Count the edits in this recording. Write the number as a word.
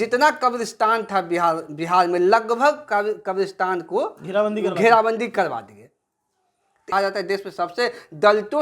one